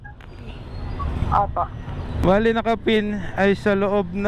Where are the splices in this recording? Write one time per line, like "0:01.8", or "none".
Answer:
0:02.1